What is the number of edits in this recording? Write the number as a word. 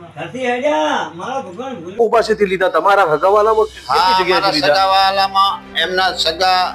one